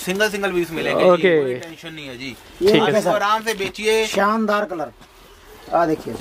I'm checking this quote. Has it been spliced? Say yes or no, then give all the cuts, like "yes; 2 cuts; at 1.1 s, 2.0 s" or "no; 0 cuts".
no; 0 cuts